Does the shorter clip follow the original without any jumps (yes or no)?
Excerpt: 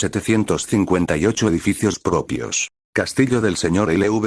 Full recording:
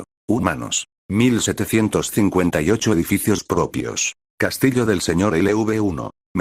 yes